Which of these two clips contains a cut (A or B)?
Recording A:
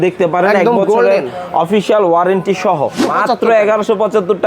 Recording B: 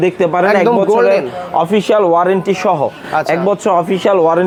A